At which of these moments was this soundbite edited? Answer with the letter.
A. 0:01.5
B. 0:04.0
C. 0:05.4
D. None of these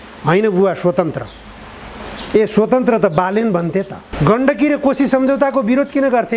B